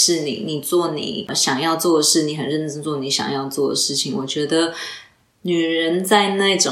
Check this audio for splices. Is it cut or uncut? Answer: cut